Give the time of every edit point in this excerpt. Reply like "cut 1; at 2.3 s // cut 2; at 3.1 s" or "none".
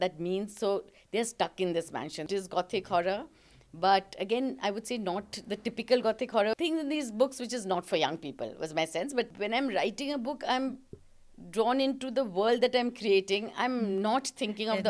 cut 1; at 2.3 s // cut 2; at 6.6 s // cut 3; at 9.3 s